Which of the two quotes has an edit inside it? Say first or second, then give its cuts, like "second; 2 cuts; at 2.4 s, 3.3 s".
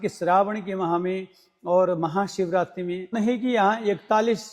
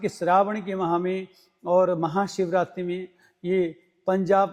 first; 1 cut; at 3.1 s